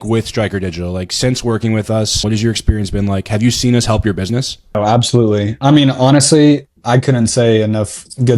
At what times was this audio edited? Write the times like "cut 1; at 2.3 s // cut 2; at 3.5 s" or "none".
cut 1; at 2.2 s // cut 2; at 4.8 s